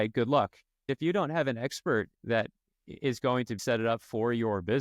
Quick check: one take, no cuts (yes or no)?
no